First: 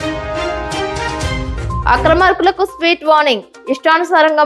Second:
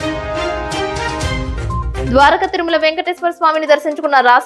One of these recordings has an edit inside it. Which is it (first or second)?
second